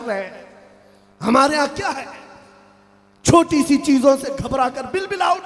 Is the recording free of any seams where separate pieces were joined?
yes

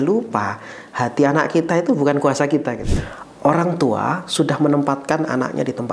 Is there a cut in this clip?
yes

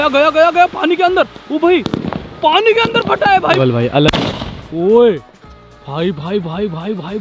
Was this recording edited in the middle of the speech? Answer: yes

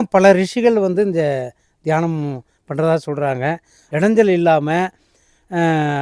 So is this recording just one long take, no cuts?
no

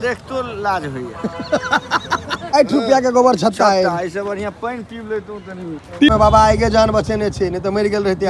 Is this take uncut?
no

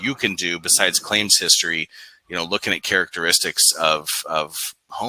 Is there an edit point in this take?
no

